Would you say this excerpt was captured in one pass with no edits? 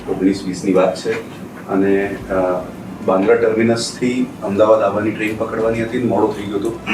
yes; 0 cuts

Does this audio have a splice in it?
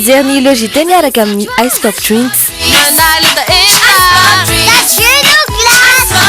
no; 0 cuts

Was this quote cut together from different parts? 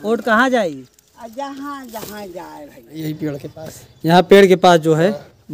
yes; 1 cut; at 3.0 s

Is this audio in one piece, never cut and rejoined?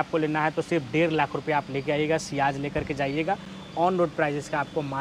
yes; 0 cuts

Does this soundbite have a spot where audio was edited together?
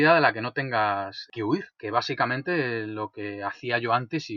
yes; 1 cut; at 1.7 s

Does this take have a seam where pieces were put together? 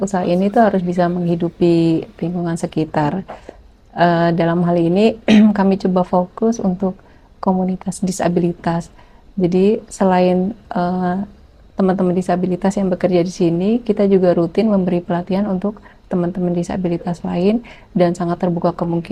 no; 0 cuts

